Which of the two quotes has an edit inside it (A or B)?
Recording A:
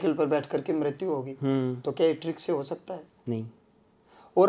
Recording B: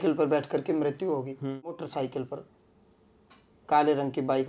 B